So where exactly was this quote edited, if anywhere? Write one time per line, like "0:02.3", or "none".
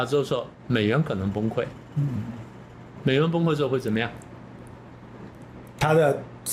none